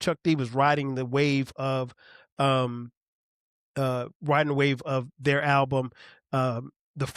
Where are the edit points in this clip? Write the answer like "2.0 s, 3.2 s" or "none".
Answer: none